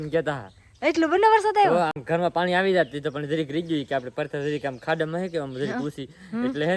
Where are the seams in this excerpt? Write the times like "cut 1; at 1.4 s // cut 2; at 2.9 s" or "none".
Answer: none